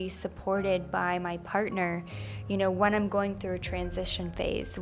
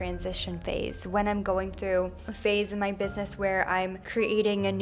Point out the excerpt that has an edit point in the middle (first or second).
second